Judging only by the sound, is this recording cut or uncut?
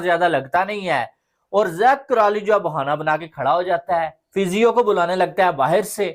cut